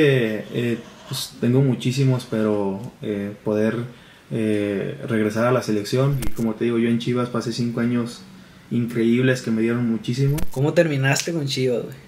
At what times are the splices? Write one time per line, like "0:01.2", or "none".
0:06.3
0:10.4